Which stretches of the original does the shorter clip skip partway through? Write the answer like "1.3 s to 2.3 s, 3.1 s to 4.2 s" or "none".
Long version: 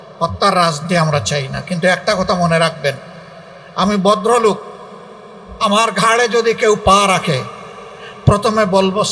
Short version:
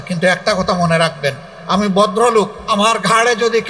3.1 s to 3.6 s, 4.7 s to 5.5 s